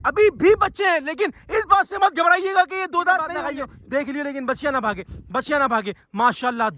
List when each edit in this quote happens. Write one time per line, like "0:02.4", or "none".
0:03.4